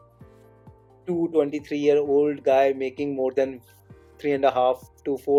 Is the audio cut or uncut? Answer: uncut